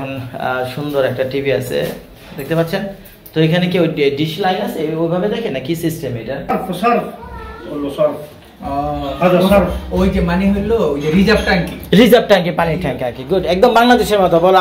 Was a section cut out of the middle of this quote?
yes; 1 cut; at 6.5 s

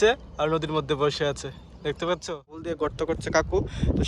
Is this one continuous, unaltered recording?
no; 1 cut; at 2.7 s

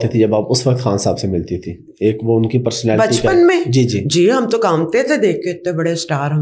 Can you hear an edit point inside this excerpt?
no; 0 cuts

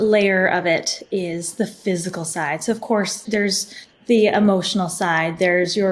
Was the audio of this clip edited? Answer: yes; 1 cut; at 3.2 s

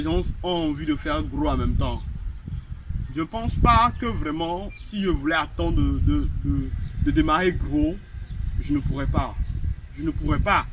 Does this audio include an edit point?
no; 0 cuts

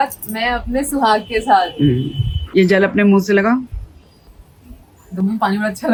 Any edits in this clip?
no; 0 cuts

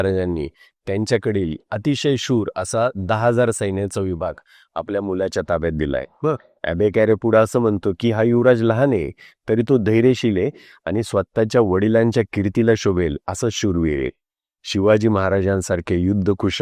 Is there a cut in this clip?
no; 0 cuts

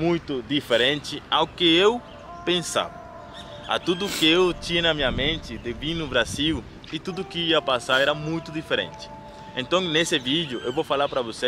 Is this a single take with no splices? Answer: yes; 0 cuts

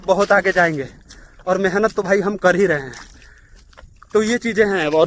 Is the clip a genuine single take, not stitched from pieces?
yes; 0 cuts

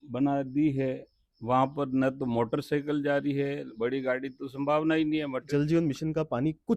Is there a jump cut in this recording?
yes; 1 cut; at 5.5 s

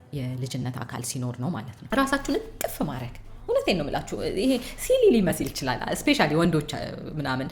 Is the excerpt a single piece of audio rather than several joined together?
no; 1 cut; at 1.7 s

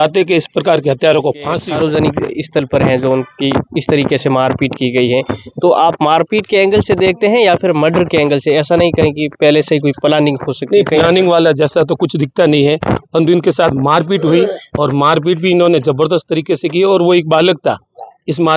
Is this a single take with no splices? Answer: no; 1 cut; at 1.6 s

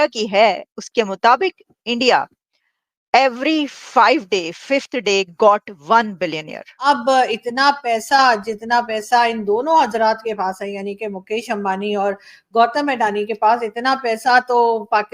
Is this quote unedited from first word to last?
no; 1 cut; at 6.8 s

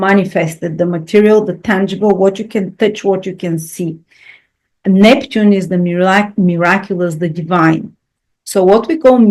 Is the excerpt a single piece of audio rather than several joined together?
yes; 0 cuts

